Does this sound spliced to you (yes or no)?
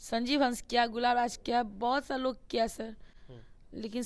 no